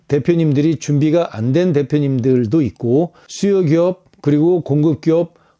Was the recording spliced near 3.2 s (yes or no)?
yes